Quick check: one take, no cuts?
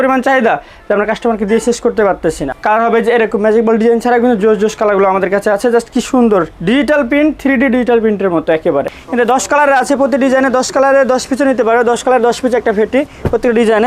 no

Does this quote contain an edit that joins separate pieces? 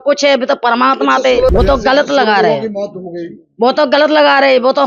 yes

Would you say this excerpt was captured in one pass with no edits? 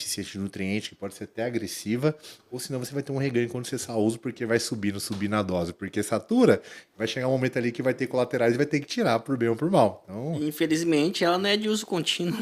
yes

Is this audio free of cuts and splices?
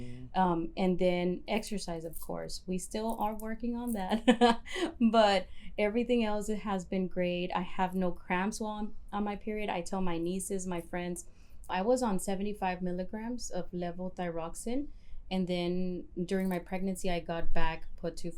no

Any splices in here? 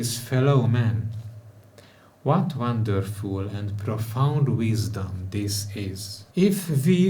yes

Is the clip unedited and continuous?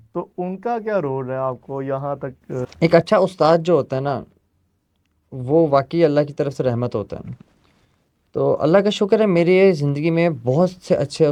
yes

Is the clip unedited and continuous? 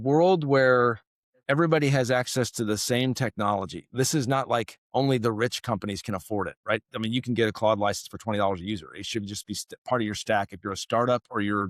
yes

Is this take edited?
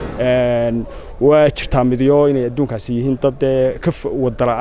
no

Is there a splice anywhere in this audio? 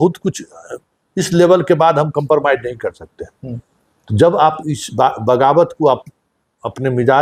no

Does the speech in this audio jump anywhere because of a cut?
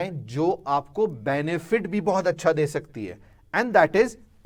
no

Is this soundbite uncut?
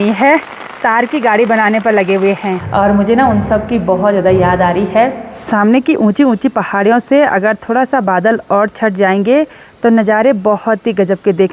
no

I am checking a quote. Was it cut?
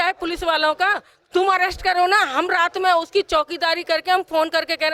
no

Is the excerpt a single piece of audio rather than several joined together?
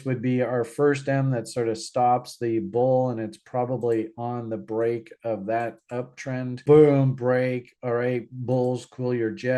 no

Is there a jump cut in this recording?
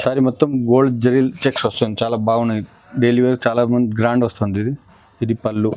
no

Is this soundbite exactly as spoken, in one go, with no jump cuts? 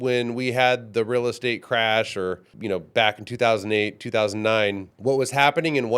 no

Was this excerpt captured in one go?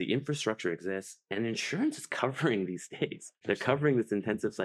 no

